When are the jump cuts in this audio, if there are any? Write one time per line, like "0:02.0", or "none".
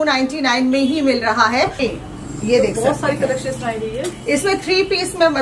0:01.8